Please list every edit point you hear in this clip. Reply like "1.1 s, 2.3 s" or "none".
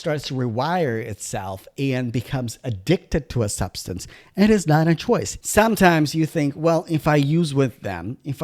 5.4 s